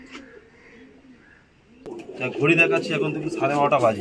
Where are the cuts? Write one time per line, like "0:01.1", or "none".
0:02.0